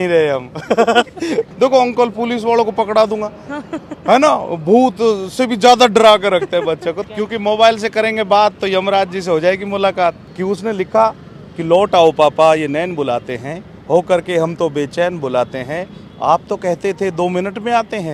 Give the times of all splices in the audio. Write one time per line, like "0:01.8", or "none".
0:01.5
0:07.0
0:10.2